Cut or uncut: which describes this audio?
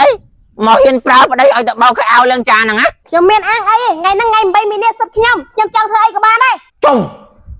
cut